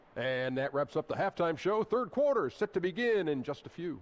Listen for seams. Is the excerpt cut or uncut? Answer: uncut